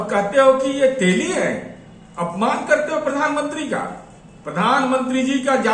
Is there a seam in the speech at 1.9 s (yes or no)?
no